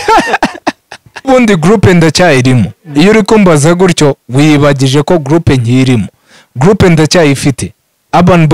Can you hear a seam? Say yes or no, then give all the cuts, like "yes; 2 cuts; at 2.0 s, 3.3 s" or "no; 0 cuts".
yes; 1 cut; at 1.3 s